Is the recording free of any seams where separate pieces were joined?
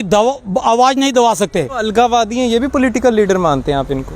no; 1 cut; at 1.8 s

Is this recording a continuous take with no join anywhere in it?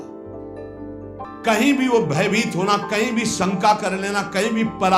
no; 1 cut; at 1.3 s

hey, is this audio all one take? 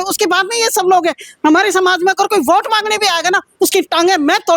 yes; 0 cuts

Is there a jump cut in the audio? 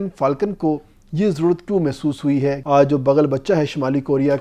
yes; 1 cut; at 2.6 s

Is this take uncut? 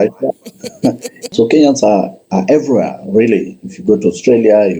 no; 1 cut; at 1.1 s

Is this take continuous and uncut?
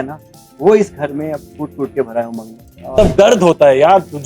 no; 1 cut; at 3.0 s

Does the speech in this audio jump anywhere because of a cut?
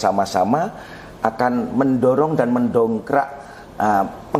no; 0 cuts

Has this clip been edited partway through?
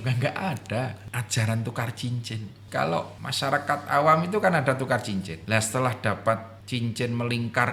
yes; 5 cuts; at 1.0 s, 2.5 s, 3.2 s, 5.4 s, 6.6 s

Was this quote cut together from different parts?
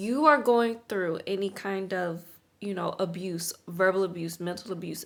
no; 0 cuts

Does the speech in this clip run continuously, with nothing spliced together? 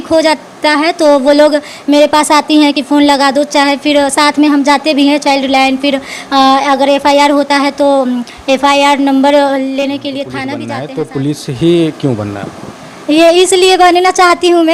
no; 1 cut; at 10.6 s

